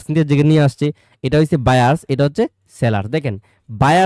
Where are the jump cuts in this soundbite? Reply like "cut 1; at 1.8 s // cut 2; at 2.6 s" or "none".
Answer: none

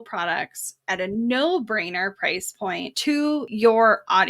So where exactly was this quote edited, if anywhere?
cut 1; at 3.3 s

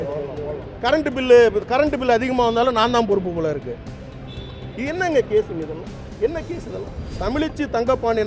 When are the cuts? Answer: cut 1; at 7.0 s

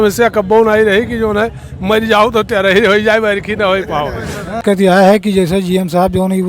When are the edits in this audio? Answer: cut 1; at 4.6 s

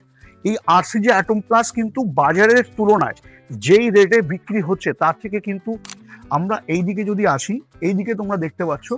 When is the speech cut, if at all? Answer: cut 1; at 6.0 s

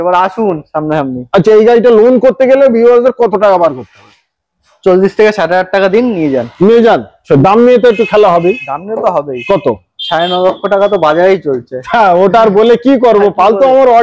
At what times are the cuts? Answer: cut 1; at 7.2 s

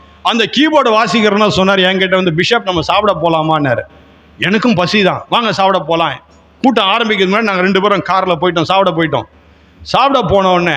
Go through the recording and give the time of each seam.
none

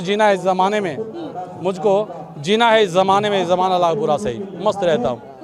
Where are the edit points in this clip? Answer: none

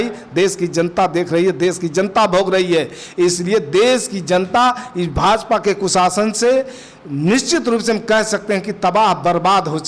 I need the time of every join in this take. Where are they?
none

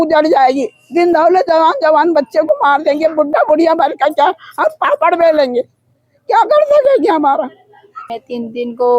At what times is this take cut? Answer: cut 1; at 8.0 s

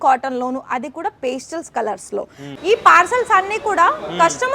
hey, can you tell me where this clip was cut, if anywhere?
cut 1; at 2.4 s

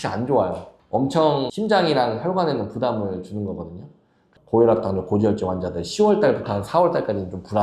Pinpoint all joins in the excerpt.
cut 1; at 4.3 s

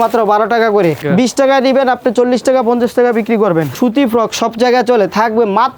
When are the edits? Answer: cut 1; at 1.0 s // cut 2; at 3.7 s

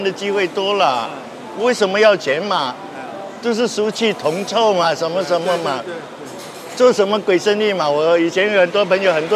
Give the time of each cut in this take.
none

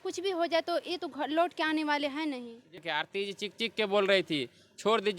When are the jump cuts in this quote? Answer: cut 1; at 2.8 s

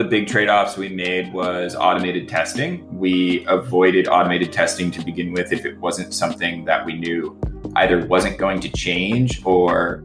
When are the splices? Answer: none

